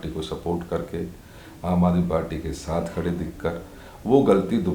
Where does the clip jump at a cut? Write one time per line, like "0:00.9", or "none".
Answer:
none